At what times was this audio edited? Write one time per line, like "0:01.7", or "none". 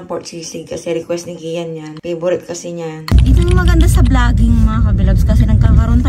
0:03.1